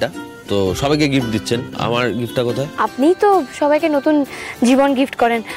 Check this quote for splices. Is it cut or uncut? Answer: cut